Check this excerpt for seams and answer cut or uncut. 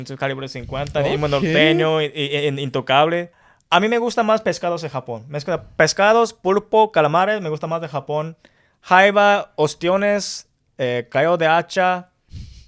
cut